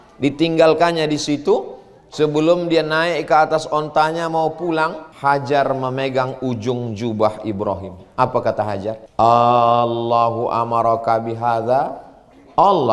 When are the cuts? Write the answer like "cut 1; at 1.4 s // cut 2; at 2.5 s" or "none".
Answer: cut 1; at 5.1 s // cut 2; at 9.0 s